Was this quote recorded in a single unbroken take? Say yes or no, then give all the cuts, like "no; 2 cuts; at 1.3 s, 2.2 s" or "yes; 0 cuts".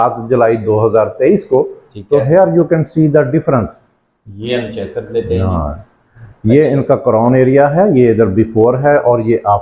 yes; 0 cuts